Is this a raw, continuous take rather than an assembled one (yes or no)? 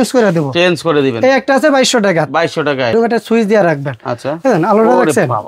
no